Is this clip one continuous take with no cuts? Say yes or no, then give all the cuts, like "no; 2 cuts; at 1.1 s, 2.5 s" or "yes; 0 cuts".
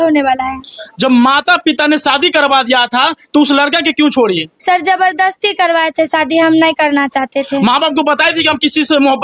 yes; 0 cuts